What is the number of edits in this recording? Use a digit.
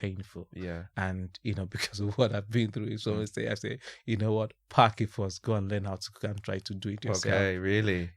0